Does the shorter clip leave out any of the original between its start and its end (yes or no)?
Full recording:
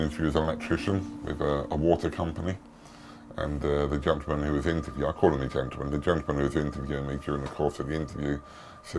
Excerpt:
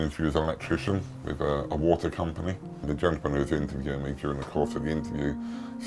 yes